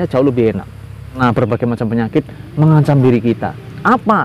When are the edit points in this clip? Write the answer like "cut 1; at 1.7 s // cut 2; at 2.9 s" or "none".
cut 1; at 1.2 s

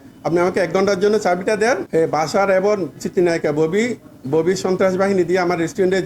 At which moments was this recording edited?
cut 1; at 1.8 s

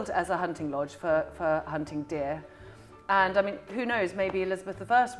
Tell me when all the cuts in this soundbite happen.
none

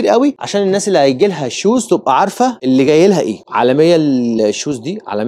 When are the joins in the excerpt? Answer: cut 1; at 3.4 s

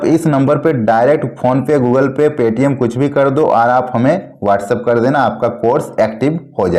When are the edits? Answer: none

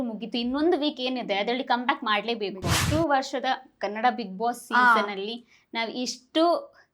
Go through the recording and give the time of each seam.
cut 1; at 2.7 s

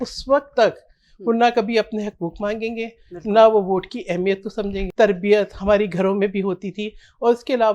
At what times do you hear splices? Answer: cut 1; at 4.8 s

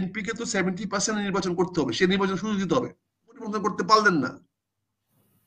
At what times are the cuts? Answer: cut 1; at 3.5 s

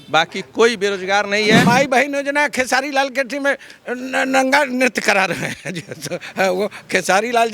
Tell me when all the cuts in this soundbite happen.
cut 1; at 1.6 s

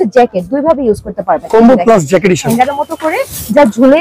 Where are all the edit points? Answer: cut 1; at 2.4 s

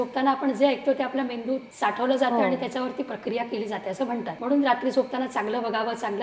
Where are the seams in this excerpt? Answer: cut 1; at 1.7 s // cut 2; at 4.3 s

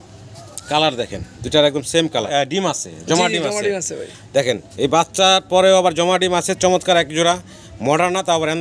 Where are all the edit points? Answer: cut 1; at 2.3 s

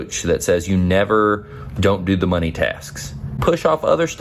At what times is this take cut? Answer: none

